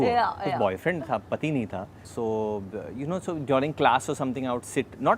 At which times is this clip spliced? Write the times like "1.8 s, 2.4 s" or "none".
none